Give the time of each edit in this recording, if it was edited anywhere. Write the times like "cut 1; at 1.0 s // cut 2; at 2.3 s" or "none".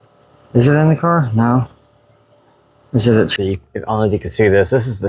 cut 1; at 3.3 s

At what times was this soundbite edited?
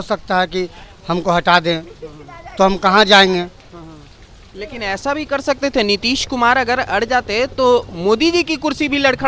none

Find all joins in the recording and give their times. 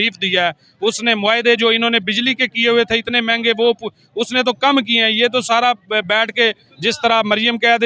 none

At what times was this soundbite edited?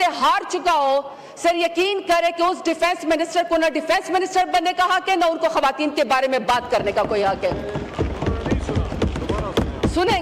none

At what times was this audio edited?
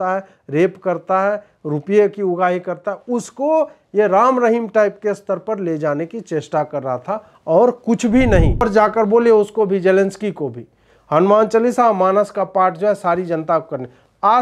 cut 1; at 8.6 s

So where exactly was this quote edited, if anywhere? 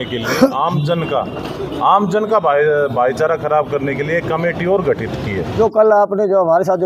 cut 1; at 5.4 s

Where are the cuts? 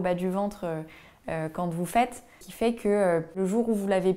cut 1; at 2.4 s // cut 2; at 3.4 s

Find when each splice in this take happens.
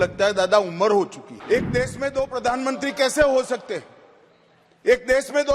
cut 1; at 1.3 s

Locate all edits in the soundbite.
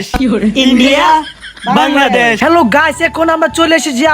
cut 1; at 2.4 s

